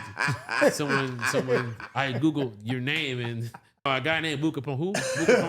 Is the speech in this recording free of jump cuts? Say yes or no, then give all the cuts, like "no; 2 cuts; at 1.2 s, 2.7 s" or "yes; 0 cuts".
no; 1 cut; at 3.9 s